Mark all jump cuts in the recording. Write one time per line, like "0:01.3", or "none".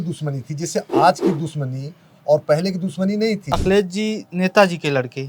0:03.4